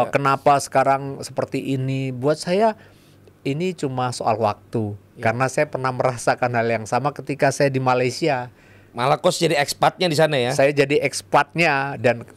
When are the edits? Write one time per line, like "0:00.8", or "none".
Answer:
none